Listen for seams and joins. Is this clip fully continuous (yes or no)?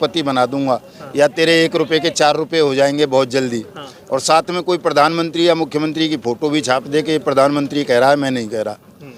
yes